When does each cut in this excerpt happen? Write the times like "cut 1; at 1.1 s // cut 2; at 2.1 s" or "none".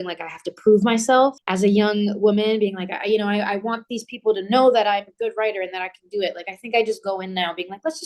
cut 1; at 1.4 s